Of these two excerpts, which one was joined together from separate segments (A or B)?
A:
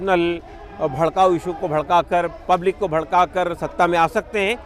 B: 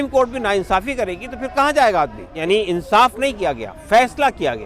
B